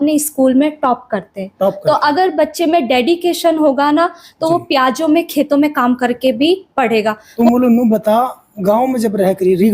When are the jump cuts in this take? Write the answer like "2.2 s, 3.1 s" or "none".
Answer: 7.3 s